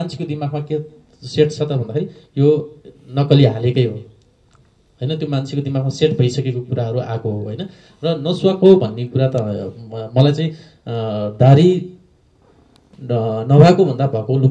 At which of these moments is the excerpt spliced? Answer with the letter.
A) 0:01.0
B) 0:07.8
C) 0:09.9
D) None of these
D